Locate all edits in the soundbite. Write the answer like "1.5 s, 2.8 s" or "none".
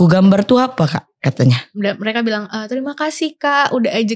1.7 s